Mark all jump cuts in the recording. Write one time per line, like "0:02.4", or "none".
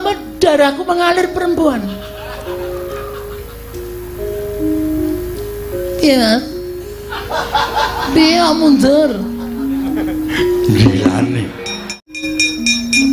0:12.2